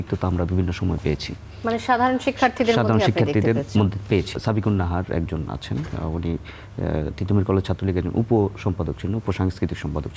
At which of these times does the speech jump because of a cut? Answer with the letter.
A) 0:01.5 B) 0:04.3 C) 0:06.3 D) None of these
B